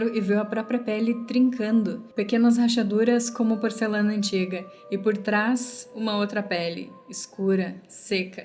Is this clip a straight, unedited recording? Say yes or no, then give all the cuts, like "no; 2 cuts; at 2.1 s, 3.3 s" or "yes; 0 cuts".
yes; 0 cuts